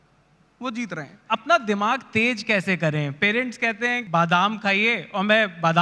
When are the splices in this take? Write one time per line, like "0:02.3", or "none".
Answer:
0:01.2
0:04.0